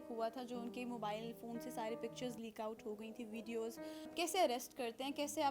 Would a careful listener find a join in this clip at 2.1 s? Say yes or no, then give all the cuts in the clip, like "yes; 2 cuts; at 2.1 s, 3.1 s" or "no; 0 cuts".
no; 1 cut; at 4.1 s